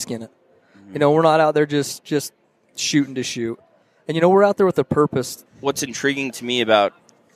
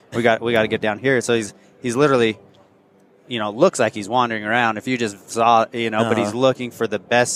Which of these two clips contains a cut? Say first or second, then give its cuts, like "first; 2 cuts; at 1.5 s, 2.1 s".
first; 1 cut; at 5.4 s